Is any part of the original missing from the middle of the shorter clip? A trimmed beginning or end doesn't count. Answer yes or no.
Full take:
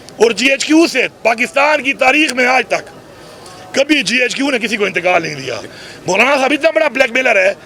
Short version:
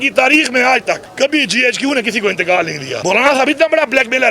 yes